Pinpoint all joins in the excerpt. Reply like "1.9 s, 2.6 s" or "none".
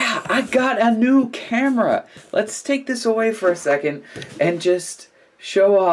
none